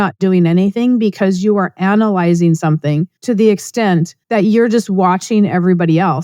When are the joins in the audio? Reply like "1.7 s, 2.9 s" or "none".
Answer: 3.1 s, 4.2 s